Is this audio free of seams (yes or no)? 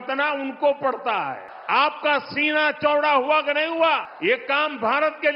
no